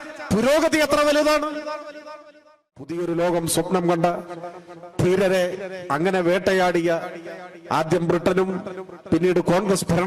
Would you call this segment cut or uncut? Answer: cut